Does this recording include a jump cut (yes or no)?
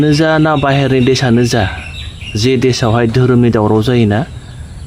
no